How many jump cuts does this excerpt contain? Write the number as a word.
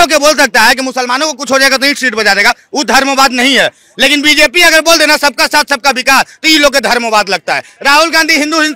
zero